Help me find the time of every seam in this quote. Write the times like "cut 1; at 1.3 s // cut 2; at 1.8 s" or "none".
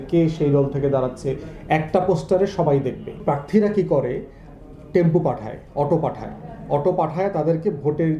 cut 1; at 3.2 s